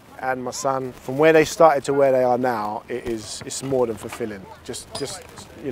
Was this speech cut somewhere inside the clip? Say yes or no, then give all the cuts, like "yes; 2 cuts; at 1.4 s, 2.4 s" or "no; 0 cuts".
no; 0 cuts